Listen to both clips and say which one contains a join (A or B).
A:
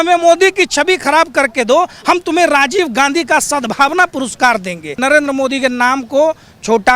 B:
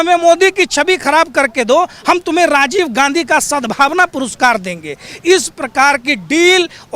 A